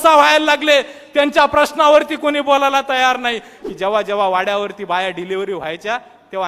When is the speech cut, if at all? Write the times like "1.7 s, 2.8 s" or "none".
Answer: 3.5 s